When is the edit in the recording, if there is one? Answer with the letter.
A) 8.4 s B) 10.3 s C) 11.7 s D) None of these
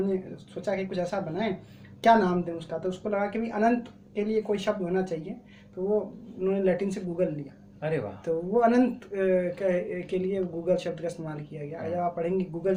D